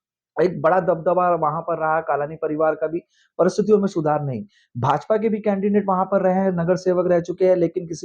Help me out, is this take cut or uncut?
uncut